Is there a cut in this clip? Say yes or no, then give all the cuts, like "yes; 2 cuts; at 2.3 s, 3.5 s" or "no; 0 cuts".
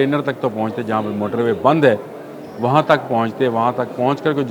no; 0 cuts